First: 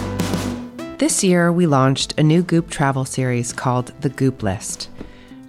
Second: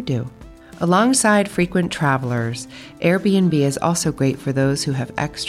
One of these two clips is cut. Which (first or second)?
first